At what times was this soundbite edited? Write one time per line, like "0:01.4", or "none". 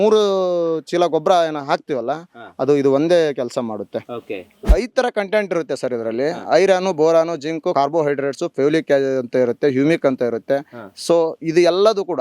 0:04.6
0:07.7